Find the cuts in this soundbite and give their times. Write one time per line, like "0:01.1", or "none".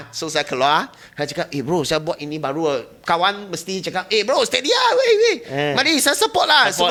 none